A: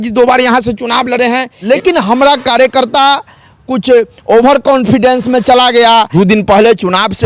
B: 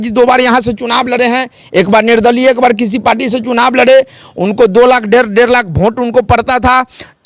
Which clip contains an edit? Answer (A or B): A